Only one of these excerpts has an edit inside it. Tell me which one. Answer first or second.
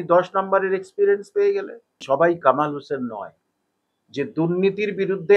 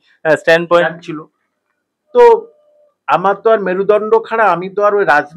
first